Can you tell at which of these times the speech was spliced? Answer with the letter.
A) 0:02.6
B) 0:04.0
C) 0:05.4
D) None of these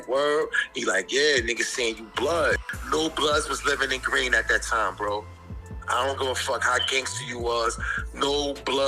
A